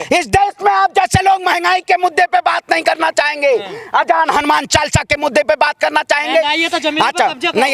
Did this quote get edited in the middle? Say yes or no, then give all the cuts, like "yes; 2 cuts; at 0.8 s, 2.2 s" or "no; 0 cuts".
no; 0 cuts